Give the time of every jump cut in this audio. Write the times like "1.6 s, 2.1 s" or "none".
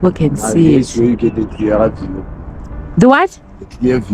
none